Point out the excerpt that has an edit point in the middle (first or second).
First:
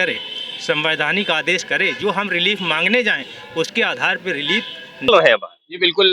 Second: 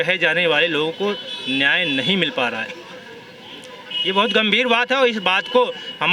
first